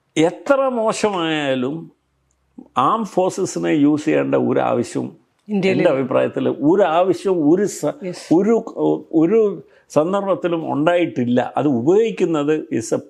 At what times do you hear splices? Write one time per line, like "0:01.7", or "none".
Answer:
none